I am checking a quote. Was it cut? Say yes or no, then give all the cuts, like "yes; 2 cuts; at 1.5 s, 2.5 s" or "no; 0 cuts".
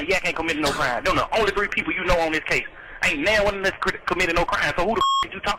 no; 0 cuts